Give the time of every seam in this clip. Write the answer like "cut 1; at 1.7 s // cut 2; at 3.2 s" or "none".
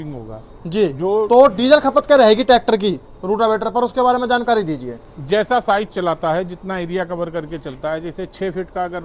none